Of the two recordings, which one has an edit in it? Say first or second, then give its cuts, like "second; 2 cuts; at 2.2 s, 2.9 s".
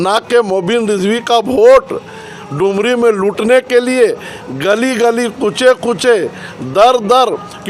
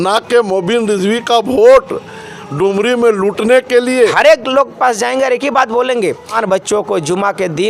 second; 2 cuts; at 4.1 s, 6.4 s